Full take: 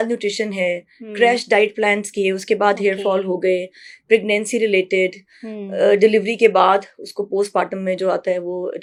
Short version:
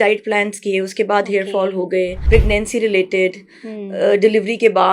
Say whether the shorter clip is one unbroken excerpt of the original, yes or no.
no